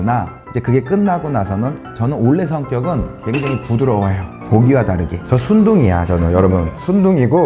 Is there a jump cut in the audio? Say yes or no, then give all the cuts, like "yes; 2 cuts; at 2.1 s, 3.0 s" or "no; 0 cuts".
yes; 1 cut; at 5.2 s